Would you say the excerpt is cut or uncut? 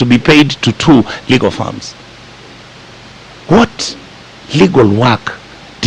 uncut